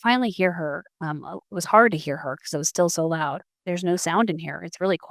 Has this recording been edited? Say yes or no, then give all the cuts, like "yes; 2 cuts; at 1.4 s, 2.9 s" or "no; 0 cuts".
yes; 1 cut; at 3.5 s